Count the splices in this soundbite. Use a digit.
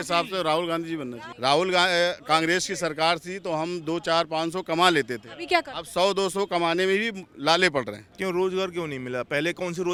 0